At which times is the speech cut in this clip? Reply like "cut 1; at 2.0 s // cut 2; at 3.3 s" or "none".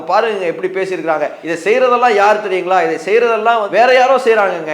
cut 1; at 1.4 s